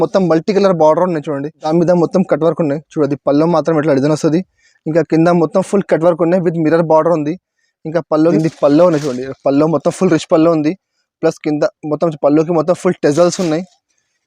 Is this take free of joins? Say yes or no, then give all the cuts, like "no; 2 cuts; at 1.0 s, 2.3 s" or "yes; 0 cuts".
no; 2 cuts; at 1.6 s, 8.3 s